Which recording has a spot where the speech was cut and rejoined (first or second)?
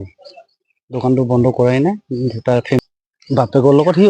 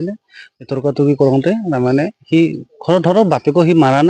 first